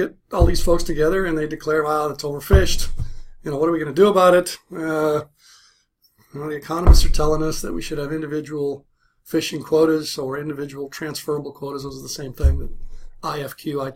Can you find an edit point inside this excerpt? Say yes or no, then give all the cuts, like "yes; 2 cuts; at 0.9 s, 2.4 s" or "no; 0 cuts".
yes; 1 cut; at 4.8 s